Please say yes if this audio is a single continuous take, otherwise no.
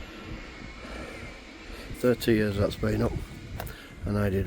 no